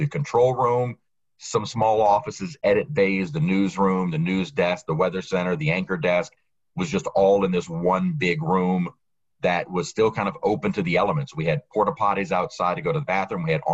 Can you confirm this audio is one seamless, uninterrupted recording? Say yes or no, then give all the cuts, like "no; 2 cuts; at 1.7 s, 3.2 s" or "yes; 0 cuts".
yes; 0 cuts